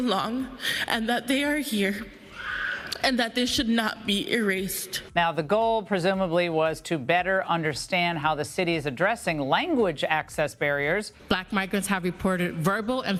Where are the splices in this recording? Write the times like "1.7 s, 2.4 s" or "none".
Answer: none